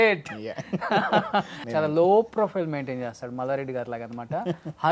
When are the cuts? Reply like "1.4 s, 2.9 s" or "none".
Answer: 1.6 s